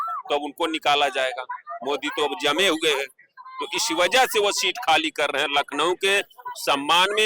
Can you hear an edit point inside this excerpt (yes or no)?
no